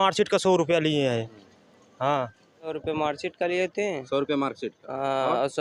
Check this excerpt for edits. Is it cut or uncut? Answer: cut